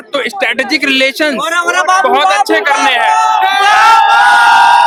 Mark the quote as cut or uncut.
uncut